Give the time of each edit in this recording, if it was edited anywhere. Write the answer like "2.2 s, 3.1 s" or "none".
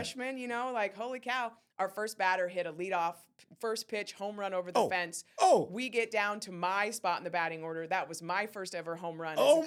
none